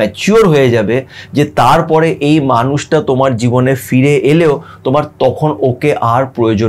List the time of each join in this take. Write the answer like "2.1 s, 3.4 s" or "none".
none